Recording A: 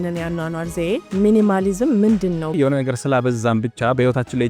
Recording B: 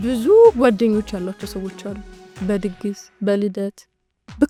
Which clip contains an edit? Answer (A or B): A